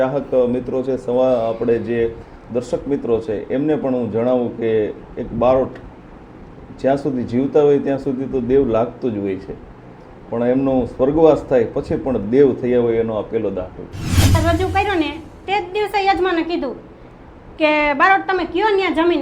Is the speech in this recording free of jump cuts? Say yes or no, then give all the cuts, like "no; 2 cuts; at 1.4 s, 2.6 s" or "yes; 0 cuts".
no; 1 cut; at 14.3 s